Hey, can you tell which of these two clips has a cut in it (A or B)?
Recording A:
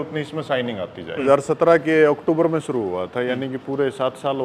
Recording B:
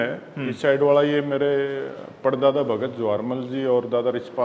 A